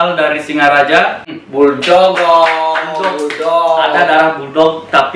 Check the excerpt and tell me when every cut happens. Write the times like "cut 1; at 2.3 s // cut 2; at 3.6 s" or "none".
cut 1; at 1.2 s